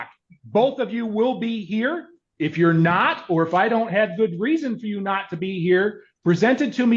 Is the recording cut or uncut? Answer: uncut